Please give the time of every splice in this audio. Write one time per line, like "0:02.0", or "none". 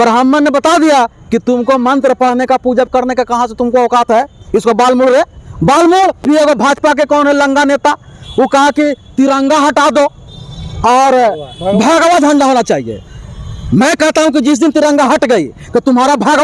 0:06.2